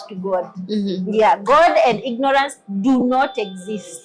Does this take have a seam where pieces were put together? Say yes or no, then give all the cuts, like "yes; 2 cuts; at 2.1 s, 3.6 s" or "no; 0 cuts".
no; 0 cuts